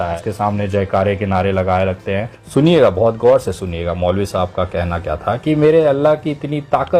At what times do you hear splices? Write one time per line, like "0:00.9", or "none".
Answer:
0:02.4